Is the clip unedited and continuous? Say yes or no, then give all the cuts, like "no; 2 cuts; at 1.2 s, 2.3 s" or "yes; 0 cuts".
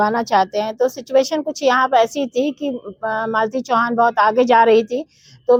yes; 0 cuts